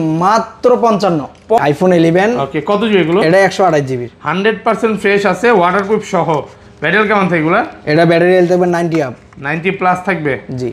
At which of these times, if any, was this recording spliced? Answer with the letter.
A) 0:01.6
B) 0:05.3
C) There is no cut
A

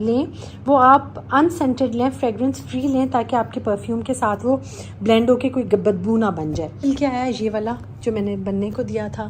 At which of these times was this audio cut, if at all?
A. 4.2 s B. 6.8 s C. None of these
B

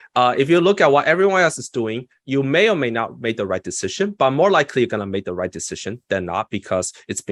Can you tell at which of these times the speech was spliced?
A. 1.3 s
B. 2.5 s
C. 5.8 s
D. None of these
D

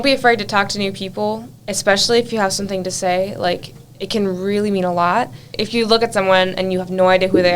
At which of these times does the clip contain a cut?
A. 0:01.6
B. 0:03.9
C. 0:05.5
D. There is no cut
C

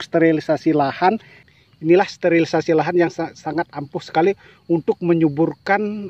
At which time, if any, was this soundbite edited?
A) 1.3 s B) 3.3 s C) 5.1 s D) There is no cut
A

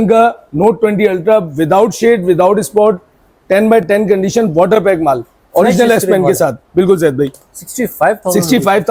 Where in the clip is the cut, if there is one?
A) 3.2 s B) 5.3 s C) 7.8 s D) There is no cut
D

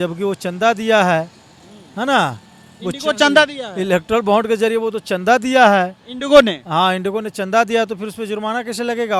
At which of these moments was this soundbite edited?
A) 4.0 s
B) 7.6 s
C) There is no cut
C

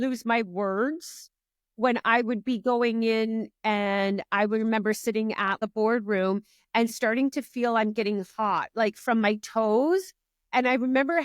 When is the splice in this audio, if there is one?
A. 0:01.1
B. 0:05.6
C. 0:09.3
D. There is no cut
B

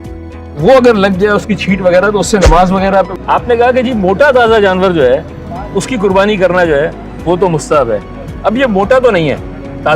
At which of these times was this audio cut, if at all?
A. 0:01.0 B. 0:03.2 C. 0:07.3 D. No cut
B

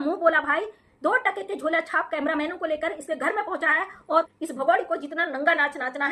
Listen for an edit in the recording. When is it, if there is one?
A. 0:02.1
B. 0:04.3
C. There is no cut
B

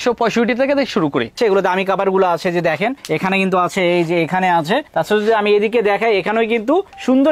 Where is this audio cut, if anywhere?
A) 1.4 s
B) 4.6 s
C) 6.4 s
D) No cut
A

